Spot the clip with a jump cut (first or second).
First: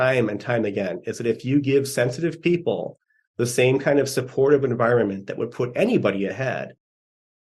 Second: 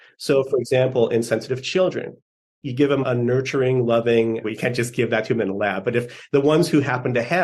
second